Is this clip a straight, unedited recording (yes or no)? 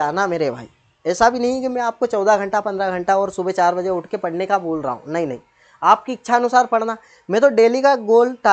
yes